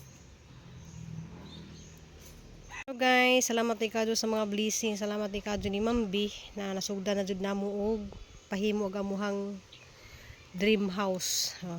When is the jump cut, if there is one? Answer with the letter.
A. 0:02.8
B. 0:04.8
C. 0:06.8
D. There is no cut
A